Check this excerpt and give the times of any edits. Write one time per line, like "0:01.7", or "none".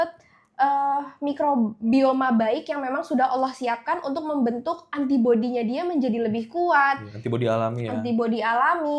none